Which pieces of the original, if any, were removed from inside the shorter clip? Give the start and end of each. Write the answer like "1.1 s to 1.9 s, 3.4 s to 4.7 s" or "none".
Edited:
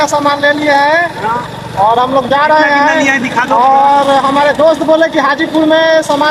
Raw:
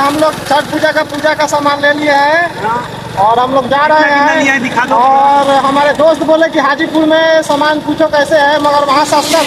none